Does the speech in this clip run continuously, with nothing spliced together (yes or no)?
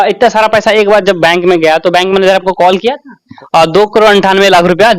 no